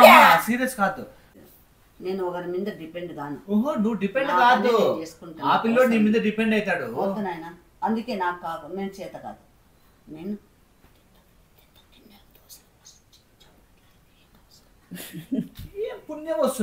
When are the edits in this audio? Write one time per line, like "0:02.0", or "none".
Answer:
0:01.2